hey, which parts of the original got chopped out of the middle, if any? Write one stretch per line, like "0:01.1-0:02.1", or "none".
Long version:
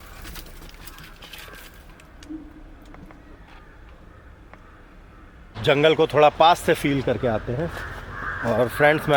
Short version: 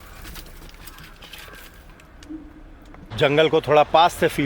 0:03.1-0:05.5